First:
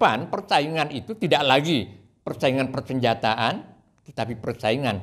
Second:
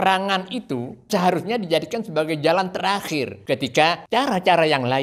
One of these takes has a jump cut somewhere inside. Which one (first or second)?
second